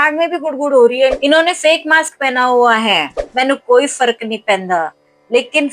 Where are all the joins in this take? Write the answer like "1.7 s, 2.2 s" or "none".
1.2 s, 3.2 s